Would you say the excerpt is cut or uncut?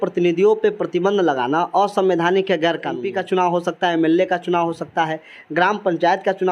cut